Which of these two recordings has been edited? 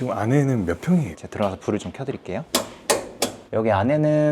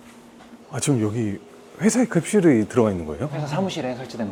first; 3 cuts; at 1.2 s, 2.4 s, 3.4 s

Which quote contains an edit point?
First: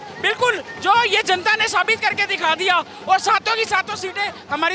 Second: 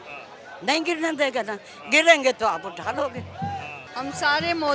second; 1 cut; at 3.8 s

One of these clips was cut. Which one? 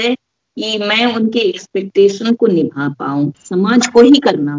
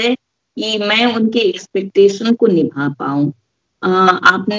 first; 1 cut; at 3.4 s

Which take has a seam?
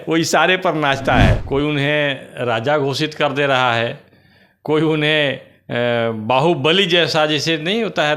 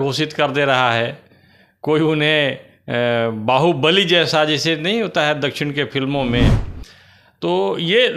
first; 1 cut; at 1.4 s

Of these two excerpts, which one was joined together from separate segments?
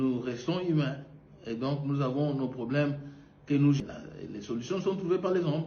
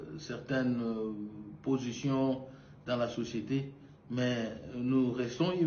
first; 1 cut; at 3.8 s

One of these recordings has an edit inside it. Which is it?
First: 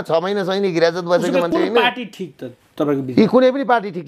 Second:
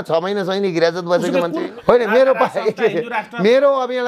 second; 1 cut; at 1.5 s

